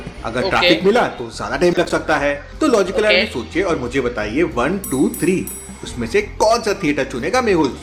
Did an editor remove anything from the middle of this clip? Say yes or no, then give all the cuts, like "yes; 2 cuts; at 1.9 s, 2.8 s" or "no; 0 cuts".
no; 0 cuts